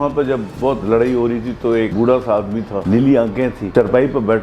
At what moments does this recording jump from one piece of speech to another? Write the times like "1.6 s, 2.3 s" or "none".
1.9 s, 2.8 s, 3.6 s